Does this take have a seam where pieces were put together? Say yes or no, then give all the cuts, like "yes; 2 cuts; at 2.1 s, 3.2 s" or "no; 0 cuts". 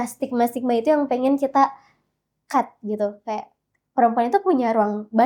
no; 0 cuts